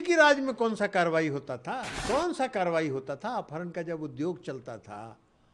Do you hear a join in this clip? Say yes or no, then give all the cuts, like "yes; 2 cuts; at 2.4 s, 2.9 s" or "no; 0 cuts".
yes; 1 cut; at 1.9 s